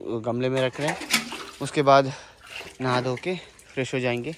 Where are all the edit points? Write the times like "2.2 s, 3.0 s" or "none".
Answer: none